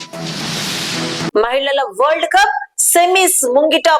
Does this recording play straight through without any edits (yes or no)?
yes